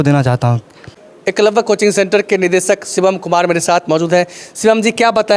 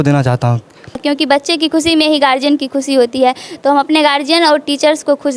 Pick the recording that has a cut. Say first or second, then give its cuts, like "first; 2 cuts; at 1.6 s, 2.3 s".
second; 1 cut; at 1.0 s